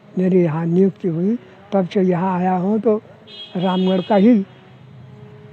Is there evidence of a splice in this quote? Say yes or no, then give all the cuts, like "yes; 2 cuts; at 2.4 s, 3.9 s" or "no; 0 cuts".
no; 0 cuts